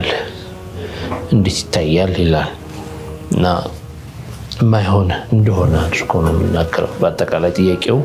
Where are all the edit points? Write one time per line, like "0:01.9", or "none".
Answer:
none